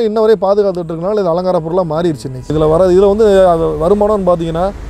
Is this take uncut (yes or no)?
no